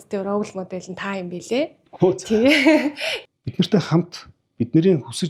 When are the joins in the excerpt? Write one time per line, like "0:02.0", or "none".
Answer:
0:03.1